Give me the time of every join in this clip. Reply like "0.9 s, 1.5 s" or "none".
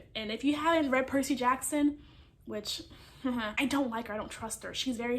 3.6 s